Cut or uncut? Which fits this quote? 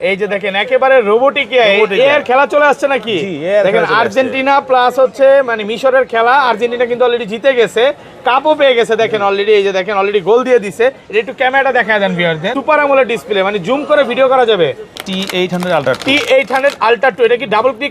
cut